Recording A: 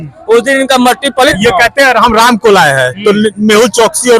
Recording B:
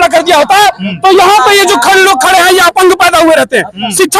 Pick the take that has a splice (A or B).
A